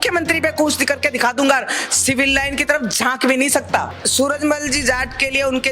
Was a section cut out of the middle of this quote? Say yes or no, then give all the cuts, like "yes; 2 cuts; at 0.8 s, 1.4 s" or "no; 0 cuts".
yes; 1 cut; at 4.0 s